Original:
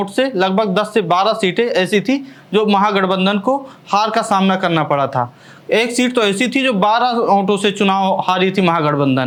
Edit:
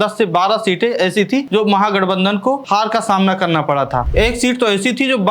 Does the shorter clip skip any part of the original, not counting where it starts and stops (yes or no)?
yes